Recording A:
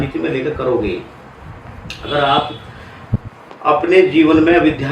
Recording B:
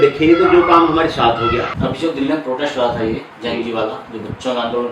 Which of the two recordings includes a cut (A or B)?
B